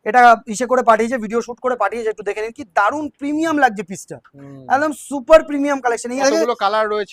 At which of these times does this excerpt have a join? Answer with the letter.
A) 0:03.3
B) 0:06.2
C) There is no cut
B